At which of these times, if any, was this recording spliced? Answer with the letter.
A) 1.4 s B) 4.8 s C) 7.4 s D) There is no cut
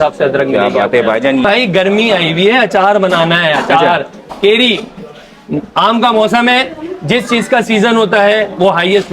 A